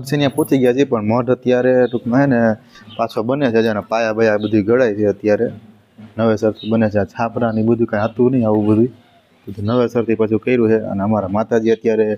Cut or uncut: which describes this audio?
uncut